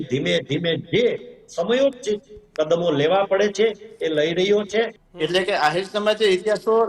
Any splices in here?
yes; 1 cut; at 5.0 s

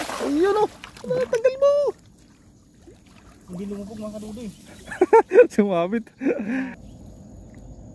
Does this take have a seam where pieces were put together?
yes; 1 cut; at 6.8 s

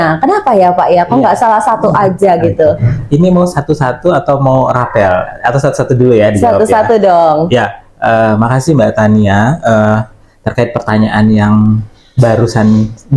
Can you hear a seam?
no; 0 cuts

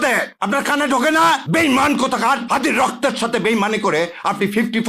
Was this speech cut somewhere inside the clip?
no; 0 cuts

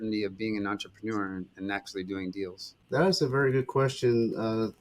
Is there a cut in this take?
yes; 1 cut; at 2.7 s

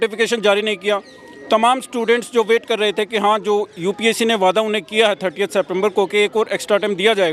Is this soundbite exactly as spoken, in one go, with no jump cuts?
yes; 0 cuts

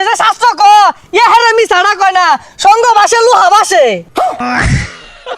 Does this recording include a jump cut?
yes; 1 cut; at 4.4 s

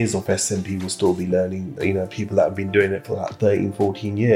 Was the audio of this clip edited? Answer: no; 0 cuts

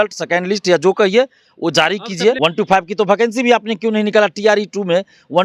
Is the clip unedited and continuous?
no; 1 cut; at 2.4 s

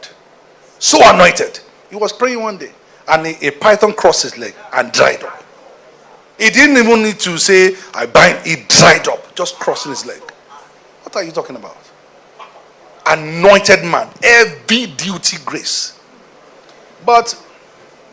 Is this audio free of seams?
yes; 0 cuts

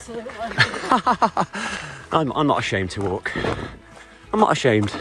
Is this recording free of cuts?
yes; 0 cuts

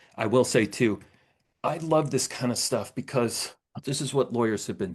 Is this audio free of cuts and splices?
no; 1 cut; at 3.8 s

